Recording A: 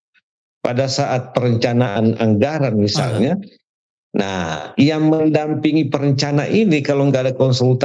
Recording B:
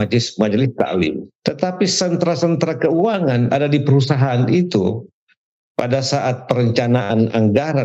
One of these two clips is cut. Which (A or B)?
B